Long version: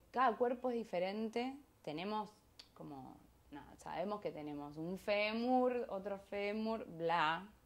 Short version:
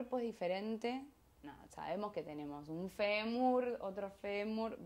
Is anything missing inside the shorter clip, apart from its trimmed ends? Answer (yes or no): yes